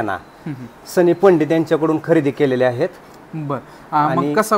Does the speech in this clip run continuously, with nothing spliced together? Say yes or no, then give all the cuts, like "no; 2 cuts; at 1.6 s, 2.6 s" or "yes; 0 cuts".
yes; 0 cuts